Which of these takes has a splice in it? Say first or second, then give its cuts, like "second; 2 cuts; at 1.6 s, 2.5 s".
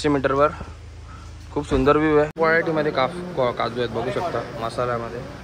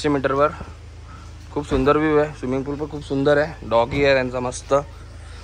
first; 1 cut; at 2.3 s